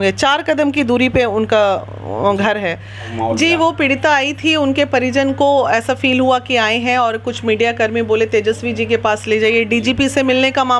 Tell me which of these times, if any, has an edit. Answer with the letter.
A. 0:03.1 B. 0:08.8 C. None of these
A